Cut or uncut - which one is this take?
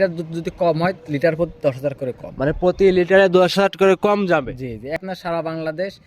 cut